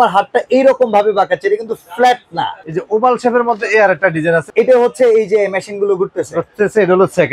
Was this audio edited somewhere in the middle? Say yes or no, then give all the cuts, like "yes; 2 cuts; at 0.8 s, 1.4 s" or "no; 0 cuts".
yes; 2 cuts; at 2.7 s, 4.5 s